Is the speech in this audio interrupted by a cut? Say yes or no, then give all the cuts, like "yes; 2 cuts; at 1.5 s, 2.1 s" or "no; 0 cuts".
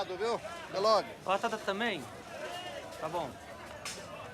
yes; 1 cut; at 1.9 s